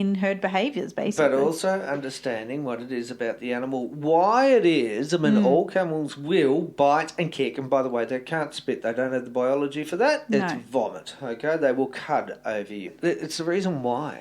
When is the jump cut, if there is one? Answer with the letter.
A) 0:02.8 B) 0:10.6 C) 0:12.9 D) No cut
C